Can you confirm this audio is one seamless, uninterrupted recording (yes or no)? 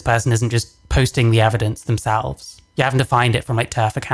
yes